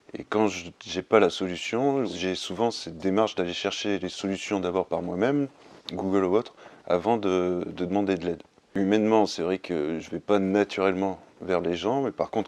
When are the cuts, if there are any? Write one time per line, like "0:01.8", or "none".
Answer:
0:02.1
0:08.7